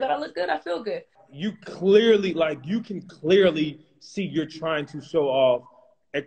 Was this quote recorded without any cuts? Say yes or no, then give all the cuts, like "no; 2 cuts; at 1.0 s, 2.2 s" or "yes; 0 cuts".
no; 1 cut; at 1.2 s